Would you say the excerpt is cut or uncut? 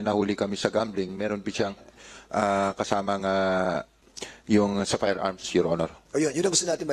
uncut